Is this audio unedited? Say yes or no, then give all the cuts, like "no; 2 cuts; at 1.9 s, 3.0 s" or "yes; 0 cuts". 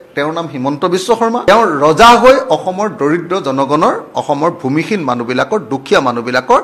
no; 1 cut; at 1.5 s